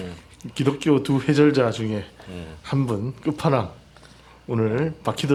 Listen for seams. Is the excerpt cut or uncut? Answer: uncut